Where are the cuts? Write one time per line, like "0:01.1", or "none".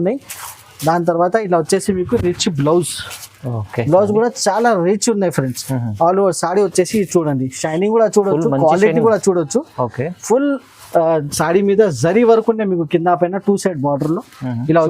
none